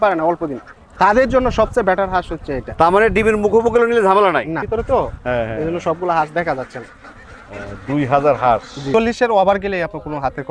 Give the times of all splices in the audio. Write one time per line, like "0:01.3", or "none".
0:04.6
0:08.8